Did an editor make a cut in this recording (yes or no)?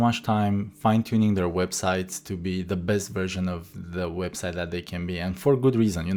no